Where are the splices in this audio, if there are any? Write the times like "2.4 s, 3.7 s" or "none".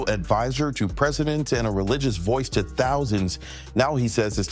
none

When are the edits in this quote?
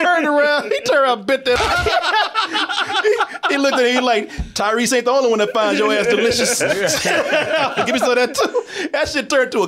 1.6 s

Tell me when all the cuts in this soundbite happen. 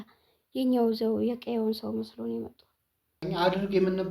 3.1 s

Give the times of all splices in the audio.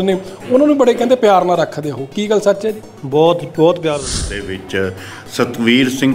4.1 s

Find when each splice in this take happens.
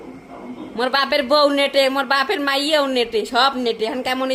none

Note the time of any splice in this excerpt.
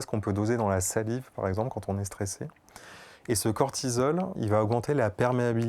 4.4 s

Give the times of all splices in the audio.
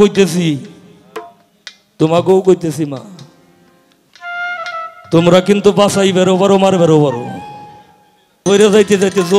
8.4 s

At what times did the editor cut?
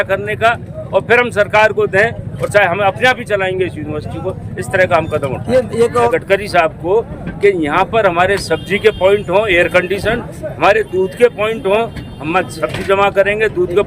6.1 s

